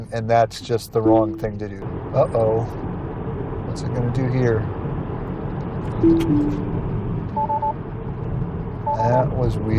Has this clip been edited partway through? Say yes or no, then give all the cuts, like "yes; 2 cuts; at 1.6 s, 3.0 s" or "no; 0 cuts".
yes; 1 cut; at 1.8 s